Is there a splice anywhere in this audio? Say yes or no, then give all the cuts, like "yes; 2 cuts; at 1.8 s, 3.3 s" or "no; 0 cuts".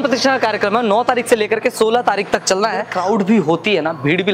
yes; 1 cut; at 2.9 s